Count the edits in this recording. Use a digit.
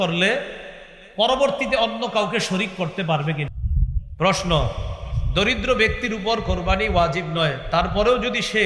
1